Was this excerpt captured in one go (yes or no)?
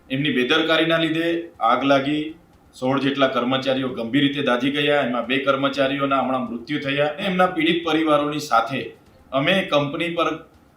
no